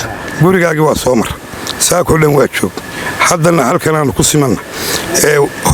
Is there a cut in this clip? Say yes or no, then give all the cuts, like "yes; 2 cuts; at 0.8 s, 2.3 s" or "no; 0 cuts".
no; 0 cuts